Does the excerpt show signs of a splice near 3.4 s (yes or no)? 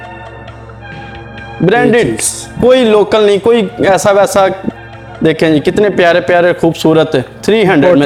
no